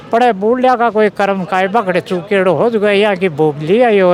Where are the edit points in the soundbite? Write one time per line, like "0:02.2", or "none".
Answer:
none

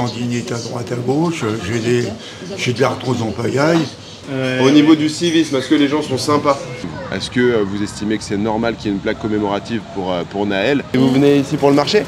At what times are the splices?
0:04.3
0:06.8
0:10.9

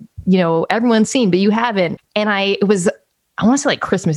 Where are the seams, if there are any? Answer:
0:02.0

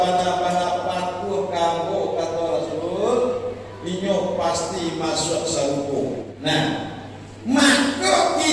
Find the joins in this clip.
0:06.3

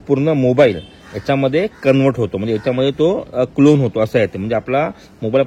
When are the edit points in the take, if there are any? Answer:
none

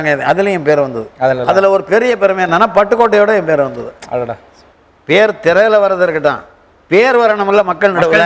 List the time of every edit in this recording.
none

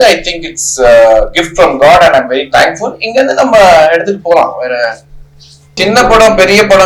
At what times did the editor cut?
0:05.7

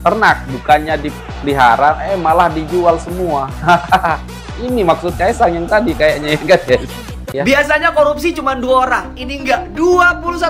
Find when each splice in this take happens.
0:07.4

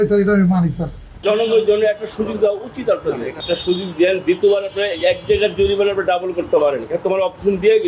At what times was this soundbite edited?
none

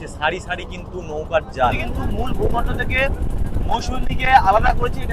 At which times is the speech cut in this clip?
0:01.9

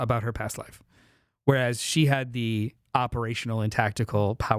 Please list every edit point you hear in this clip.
0:02.8

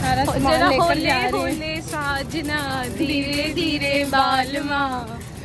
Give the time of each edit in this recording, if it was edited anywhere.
none

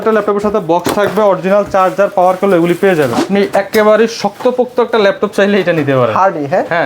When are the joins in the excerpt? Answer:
0:03.2

